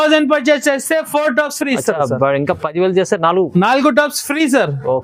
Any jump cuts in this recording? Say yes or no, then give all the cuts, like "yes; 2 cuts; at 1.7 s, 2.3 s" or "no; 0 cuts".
no; 0 cuts